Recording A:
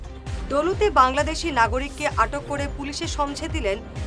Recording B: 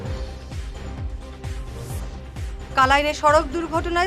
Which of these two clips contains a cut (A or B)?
B